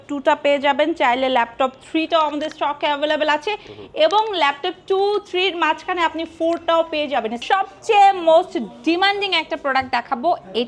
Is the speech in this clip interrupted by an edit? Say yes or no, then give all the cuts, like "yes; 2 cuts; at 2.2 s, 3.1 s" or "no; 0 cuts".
yes; 1 cut; at 7.4 s